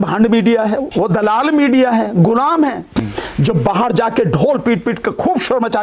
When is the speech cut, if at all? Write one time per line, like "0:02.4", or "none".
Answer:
0:00.9
0:03.0